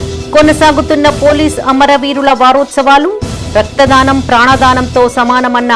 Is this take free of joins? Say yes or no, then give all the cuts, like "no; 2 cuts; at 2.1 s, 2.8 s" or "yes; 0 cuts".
yes; 0 cuts